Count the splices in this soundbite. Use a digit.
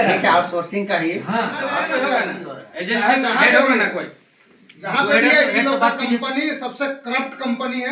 1